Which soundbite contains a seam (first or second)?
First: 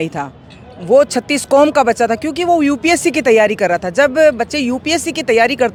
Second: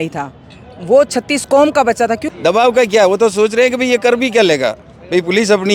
second